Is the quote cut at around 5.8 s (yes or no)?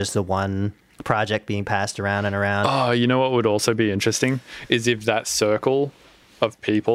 no